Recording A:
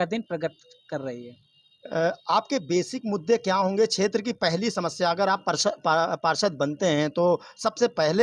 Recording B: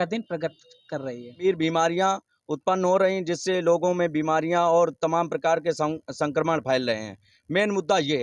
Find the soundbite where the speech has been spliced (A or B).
B